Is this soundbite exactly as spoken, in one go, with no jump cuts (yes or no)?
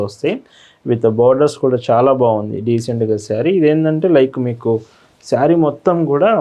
yes